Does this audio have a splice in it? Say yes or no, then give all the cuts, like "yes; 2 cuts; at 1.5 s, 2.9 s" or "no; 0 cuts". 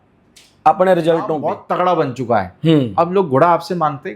yes; 1 cut; at 1.6 s